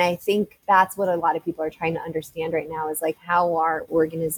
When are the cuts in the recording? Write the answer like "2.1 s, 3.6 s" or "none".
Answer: none